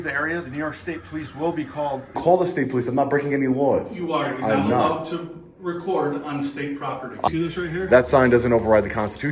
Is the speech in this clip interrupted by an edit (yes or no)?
yes